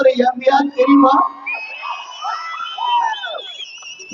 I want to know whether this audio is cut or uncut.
uncut